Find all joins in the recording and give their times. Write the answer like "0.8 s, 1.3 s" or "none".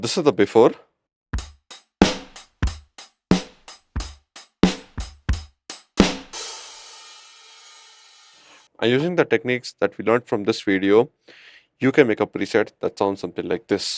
none